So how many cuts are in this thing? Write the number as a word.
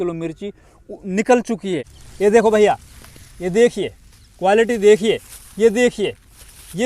one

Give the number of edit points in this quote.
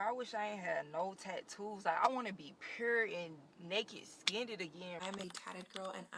one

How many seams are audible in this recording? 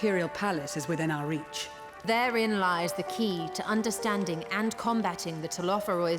one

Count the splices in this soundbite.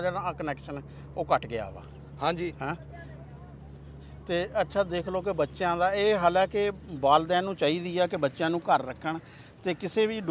zero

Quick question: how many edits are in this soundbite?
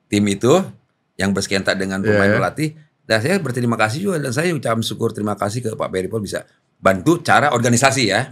zero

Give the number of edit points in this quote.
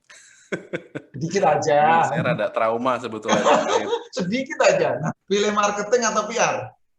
one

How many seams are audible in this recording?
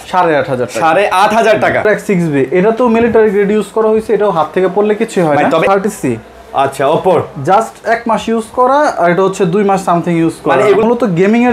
three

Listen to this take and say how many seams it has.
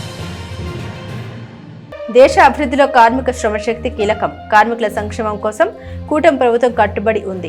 one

